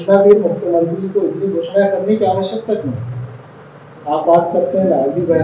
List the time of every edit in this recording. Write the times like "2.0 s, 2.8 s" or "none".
none